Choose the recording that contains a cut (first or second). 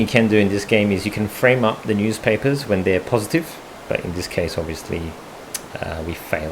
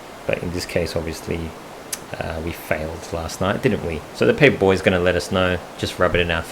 second